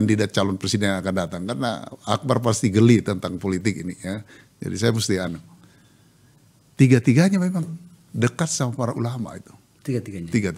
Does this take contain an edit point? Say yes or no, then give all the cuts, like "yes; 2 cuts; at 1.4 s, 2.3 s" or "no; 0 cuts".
no; 0 cuts